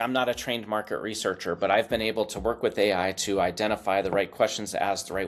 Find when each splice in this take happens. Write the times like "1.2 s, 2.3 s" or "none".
none